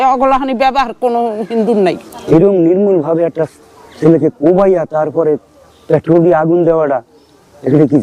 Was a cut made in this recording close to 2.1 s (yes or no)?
yes